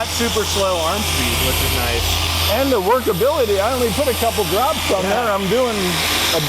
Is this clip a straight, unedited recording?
yes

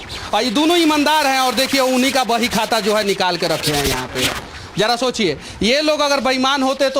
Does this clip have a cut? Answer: no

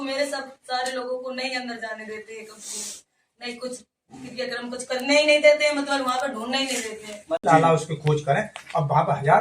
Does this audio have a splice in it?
yes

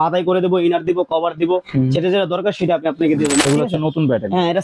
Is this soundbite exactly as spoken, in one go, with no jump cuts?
no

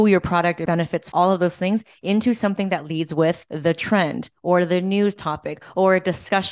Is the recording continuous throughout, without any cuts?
no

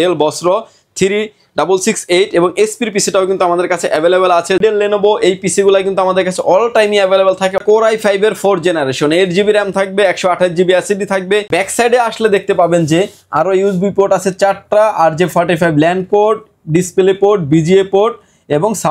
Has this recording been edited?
yes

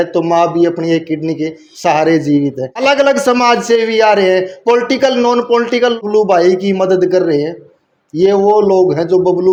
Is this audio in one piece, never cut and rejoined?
yes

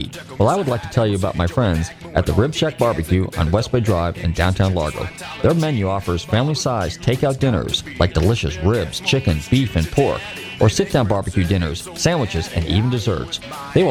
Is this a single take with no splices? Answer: yes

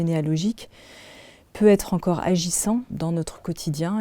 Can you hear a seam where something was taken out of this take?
yes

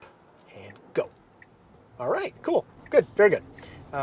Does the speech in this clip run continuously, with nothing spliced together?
yes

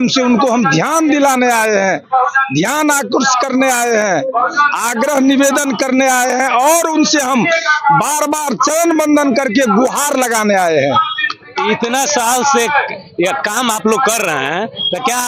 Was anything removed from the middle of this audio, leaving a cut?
no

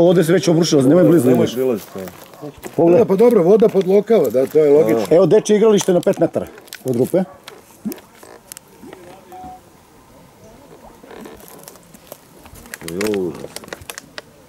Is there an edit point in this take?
no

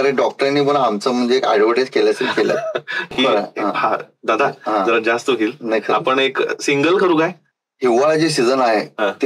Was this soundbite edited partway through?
yes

